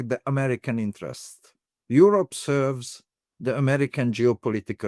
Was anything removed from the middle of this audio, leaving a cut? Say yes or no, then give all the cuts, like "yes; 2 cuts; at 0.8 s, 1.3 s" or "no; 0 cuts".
no; 0 cuts